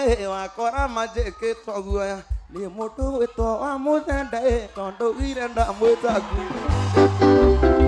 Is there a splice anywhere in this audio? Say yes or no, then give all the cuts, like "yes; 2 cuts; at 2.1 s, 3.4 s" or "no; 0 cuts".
no; 0 cuts